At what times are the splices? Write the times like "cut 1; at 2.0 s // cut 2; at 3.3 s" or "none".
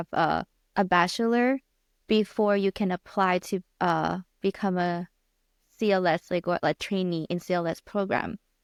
none